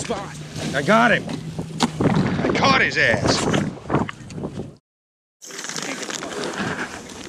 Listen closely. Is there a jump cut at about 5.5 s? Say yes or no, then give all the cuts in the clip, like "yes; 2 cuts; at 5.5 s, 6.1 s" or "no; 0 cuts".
yes; 1 cut; at 5.5 s